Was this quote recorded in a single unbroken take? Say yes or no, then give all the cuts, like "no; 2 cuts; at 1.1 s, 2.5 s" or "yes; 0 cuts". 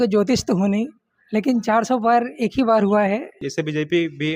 no; 1 cut; at 3.4 s